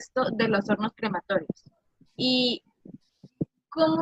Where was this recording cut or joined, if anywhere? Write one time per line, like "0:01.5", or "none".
none